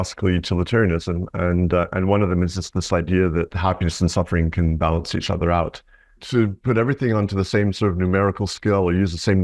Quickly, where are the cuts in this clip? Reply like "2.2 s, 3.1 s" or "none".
3.5 s, 6.2 s